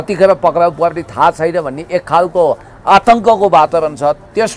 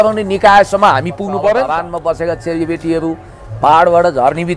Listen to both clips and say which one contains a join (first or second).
second